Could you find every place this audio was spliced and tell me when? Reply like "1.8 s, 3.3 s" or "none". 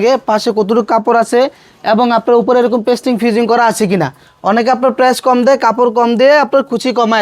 none